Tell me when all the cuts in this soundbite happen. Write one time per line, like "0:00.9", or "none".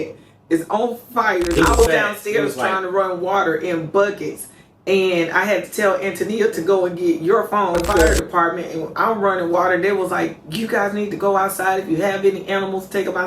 0:01.6
0:08.2